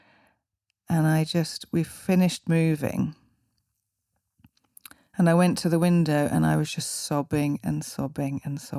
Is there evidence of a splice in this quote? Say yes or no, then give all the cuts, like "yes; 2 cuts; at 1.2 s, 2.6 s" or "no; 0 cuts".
no; 0 cuts